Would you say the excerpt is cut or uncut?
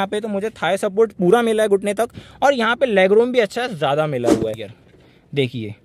cut